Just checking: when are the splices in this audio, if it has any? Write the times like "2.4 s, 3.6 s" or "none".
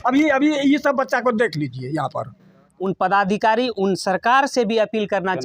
2.7 s